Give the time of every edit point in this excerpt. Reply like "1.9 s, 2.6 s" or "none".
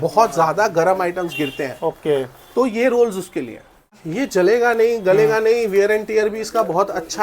4.0 s